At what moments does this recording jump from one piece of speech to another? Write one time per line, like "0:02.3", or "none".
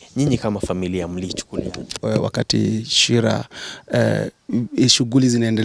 0:01.9